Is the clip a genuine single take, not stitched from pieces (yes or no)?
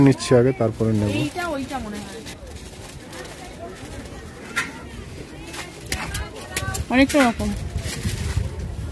yes